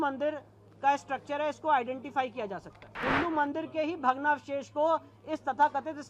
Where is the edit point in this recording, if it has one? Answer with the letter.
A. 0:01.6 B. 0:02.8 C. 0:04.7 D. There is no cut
B